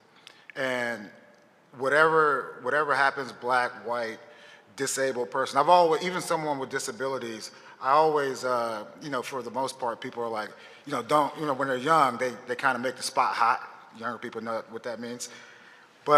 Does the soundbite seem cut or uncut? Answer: uncut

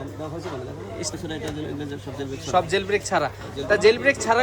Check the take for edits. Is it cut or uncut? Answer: cut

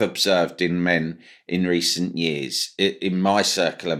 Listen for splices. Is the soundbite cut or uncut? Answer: uncut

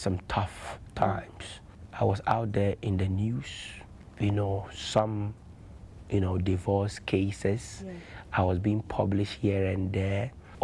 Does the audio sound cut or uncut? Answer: uncut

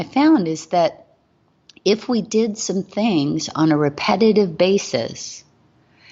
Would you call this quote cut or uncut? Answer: uncut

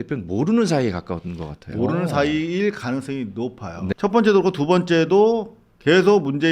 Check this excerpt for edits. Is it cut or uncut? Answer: cut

